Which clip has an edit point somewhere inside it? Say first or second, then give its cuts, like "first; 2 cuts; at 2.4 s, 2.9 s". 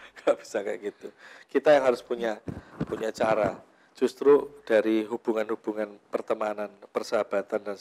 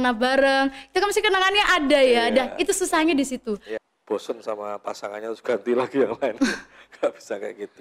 second; 1 cut; at 3.7 s